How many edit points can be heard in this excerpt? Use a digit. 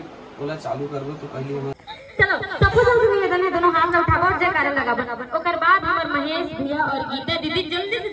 1